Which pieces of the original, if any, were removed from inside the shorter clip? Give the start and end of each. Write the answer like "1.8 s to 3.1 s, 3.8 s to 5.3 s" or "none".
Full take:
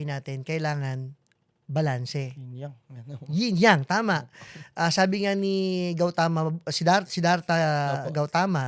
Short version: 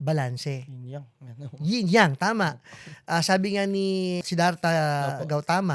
5.9 s to 7.1 s